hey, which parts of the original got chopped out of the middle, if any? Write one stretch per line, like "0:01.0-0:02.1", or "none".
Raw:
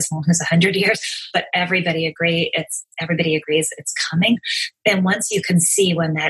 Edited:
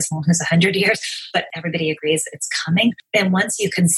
0:01.5-0:02.9
0:04.5-0:04.7